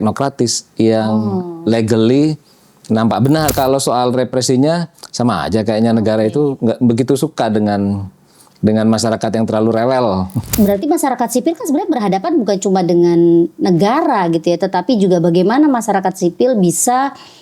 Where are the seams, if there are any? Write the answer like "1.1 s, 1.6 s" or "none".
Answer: 3.5 s, 10.4 s